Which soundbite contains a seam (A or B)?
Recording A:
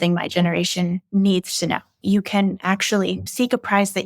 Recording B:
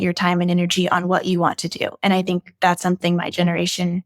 A